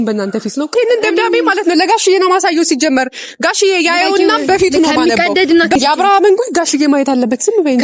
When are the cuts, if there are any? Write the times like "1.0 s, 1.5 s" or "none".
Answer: 0.7 s, 5.8 s